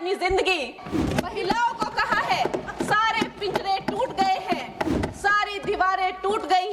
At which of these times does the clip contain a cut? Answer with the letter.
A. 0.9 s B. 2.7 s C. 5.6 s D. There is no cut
A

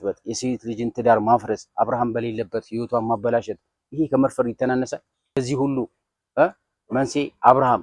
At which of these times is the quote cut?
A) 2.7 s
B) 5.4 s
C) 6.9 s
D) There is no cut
B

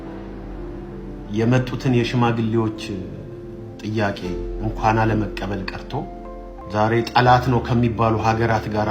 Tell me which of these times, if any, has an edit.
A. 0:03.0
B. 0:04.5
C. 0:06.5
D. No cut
C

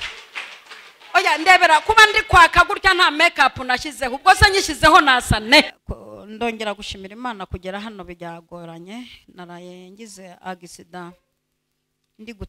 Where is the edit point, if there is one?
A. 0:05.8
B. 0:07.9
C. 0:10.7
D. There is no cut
A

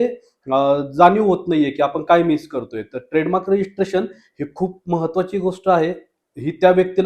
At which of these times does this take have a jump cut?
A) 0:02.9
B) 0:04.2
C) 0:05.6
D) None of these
D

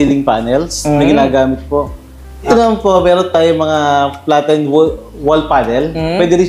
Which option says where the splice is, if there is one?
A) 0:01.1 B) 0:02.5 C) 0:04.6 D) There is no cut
B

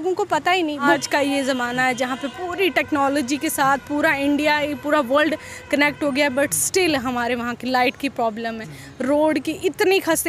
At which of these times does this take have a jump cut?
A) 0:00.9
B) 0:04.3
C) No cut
A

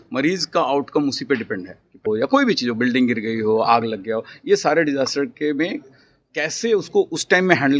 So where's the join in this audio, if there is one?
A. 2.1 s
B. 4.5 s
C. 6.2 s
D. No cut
A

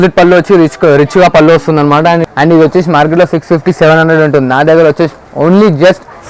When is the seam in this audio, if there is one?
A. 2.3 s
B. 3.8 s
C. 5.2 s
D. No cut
A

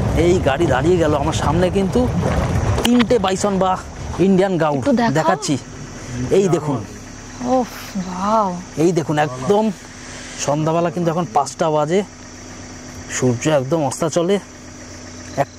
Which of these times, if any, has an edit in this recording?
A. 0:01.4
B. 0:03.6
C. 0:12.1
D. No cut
D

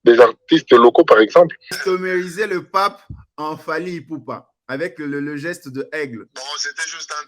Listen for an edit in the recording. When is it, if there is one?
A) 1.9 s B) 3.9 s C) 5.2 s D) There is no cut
A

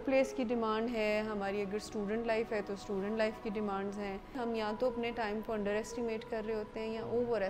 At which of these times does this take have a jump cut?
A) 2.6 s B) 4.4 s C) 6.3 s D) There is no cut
B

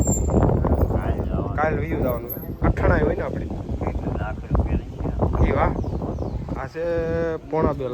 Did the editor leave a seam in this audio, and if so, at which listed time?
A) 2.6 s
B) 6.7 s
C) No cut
A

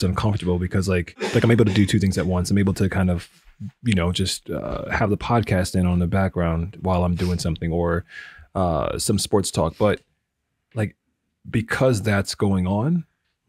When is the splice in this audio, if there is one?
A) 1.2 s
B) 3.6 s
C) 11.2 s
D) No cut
A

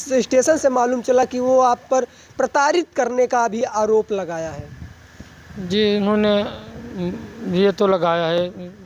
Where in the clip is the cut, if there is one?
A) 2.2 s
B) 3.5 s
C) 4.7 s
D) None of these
D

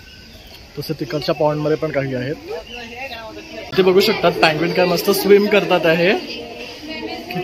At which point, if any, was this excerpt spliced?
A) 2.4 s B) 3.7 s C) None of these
B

